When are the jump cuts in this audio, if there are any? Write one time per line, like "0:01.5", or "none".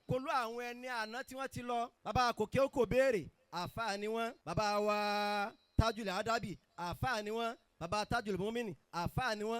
0:02.0
0:04.4